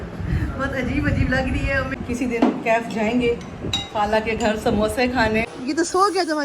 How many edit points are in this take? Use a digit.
2